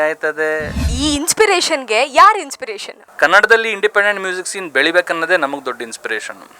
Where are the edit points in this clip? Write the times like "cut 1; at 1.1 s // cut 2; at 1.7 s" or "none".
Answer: cut 1; at 0.9 s // cut 2; at 3.0 s